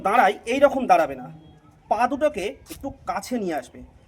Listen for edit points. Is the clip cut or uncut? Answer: uncut